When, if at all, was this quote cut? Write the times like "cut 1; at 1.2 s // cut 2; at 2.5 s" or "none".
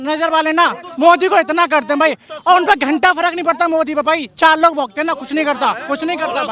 none